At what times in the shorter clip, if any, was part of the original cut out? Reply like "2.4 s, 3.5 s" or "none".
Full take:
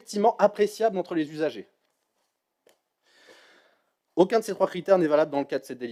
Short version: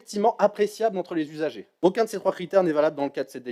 1.7 s